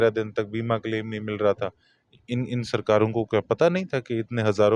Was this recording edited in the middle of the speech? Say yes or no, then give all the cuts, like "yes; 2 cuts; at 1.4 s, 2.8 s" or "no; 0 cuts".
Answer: no; 0 cuts